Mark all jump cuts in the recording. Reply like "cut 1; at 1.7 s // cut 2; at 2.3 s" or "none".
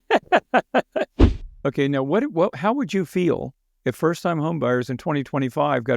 cut 1; at 1.2 s

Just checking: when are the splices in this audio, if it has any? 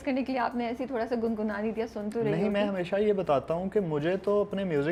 none

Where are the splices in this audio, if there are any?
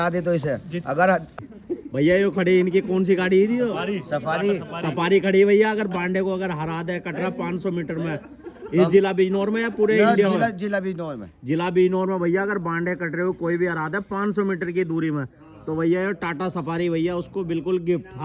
cut 1; at 1.4 s

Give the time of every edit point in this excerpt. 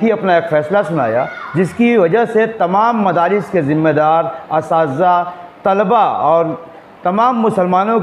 none

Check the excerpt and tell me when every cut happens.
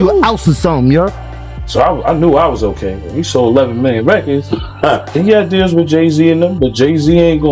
cut 1; at 1.1 s // cut 2; at 5.2 s

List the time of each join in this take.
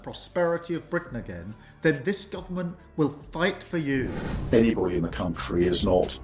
cut 1; at 4.2 s

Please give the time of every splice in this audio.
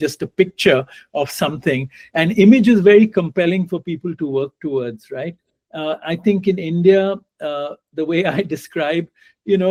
none

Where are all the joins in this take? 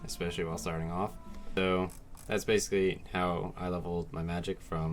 cut 1; at 1.6 s

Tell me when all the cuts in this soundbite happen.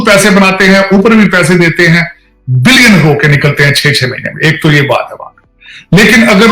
none

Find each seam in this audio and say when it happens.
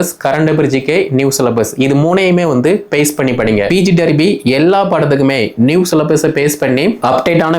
cut 1; at 3.7 s

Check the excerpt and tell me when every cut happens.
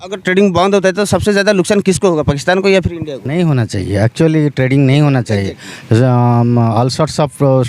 cut 1; at 3.2 s

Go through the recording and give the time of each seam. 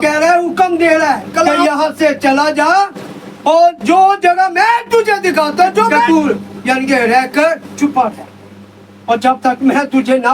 cut 1; at 1.5 s // cut 2; at 6.1 s // cut 3; at 7.7 s

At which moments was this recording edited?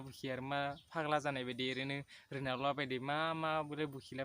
none

